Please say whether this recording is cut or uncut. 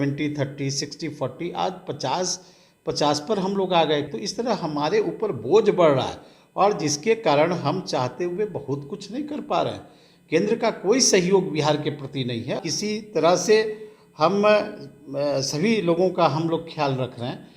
cut